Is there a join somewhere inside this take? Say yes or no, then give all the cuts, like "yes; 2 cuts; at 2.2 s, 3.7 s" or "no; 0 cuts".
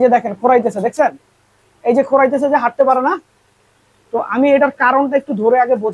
no; 0 cuts